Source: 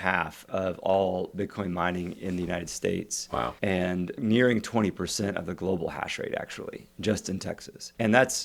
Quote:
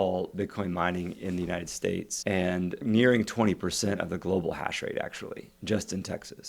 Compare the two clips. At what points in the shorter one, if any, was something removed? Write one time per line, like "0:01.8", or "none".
0:02.2